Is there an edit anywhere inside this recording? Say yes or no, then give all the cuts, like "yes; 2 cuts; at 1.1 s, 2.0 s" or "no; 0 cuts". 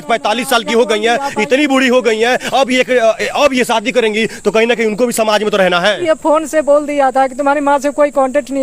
no; 0 cuts